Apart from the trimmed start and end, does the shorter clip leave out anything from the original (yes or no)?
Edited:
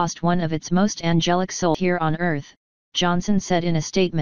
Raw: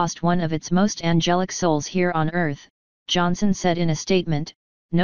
yes